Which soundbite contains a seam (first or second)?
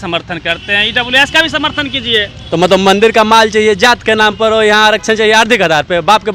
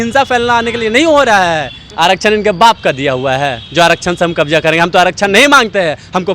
second